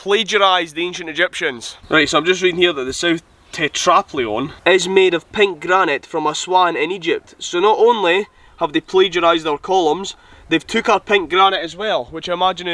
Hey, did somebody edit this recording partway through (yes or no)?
no